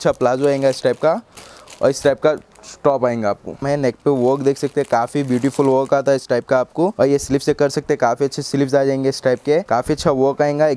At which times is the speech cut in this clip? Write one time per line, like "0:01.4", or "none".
0:03.6
0:06.9
0:09.7